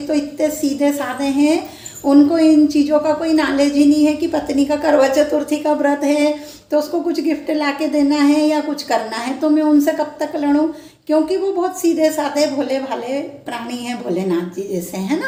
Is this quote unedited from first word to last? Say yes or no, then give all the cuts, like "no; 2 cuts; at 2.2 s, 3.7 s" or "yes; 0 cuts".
yes; 0 cuts